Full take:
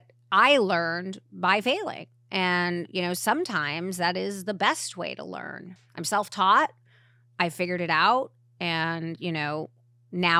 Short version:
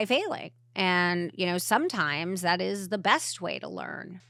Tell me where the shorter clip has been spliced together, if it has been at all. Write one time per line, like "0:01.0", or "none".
none